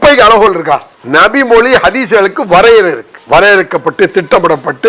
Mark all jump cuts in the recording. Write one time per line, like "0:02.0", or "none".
0:00.9
0:03.1